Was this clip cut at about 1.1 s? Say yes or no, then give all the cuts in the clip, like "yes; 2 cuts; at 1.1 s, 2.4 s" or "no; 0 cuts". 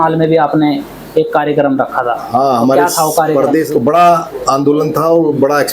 no; 1 cut; at 3.7 s